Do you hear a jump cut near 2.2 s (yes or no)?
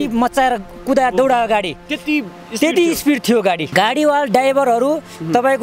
no